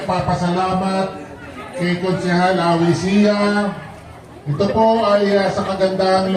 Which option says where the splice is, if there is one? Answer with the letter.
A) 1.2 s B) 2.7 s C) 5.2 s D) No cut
D